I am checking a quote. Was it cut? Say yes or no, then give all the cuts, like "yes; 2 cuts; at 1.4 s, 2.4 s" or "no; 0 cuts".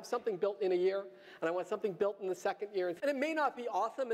yes; 1 cut; at 3.0 s